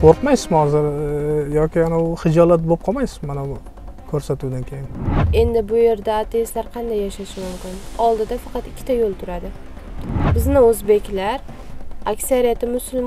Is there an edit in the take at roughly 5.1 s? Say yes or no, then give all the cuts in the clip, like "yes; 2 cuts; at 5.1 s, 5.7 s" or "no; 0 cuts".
yes; 2 cuts; at 5.1 s, 10.3 s